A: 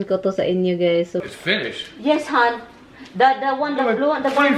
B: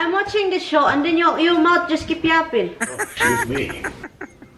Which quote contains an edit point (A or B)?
A